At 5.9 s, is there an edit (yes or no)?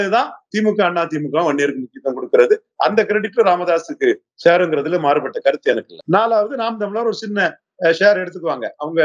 yes